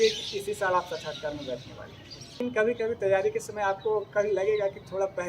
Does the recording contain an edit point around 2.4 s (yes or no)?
yes